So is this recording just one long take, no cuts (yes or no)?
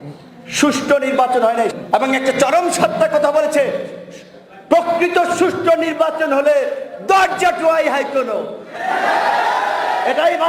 no